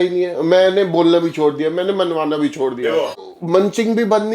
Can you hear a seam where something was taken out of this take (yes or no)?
yes